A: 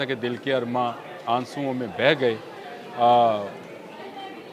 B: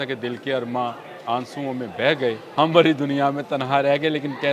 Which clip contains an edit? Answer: B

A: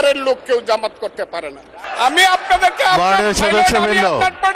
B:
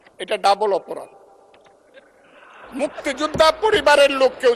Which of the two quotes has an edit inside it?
A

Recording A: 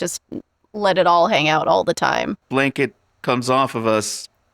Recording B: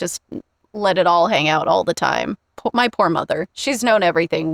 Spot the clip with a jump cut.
A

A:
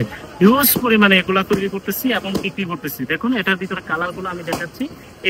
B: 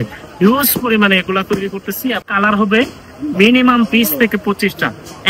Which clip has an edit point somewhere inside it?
B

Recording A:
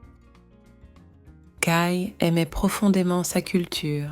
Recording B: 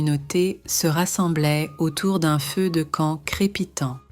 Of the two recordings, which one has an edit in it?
A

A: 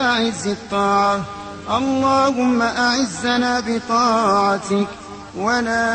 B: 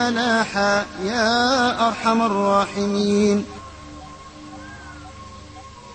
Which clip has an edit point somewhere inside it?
B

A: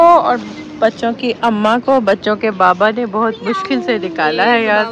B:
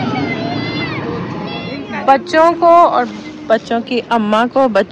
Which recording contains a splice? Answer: B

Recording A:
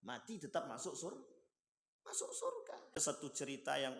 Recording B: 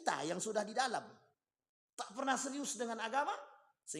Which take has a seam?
A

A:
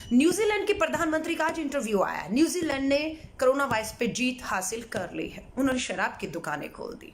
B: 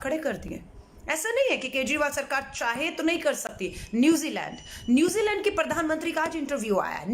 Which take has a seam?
A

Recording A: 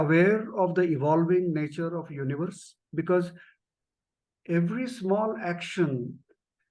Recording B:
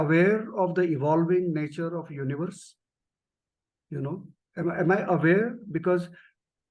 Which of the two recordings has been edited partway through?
A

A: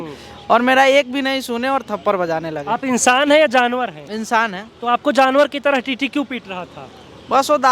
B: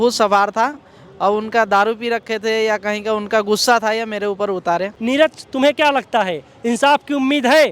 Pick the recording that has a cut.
B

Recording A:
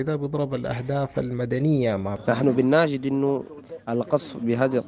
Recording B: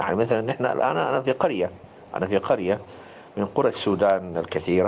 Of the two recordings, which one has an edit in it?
A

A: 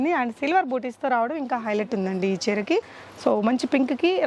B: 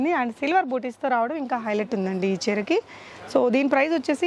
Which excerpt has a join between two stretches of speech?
A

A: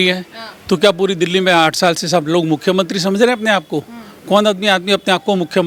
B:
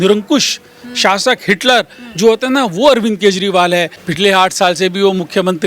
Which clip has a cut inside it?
B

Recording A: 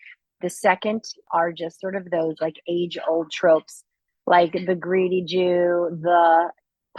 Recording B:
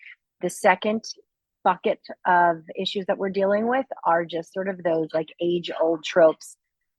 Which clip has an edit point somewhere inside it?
A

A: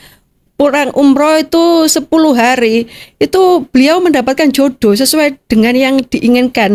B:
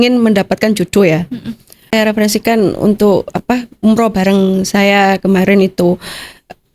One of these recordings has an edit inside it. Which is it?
B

